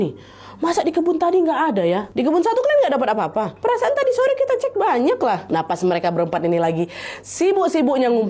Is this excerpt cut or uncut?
cut